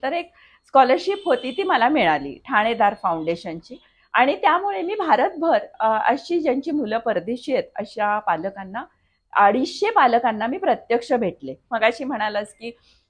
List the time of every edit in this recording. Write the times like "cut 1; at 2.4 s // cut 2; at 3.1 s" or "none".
cut 1; at 11.7 s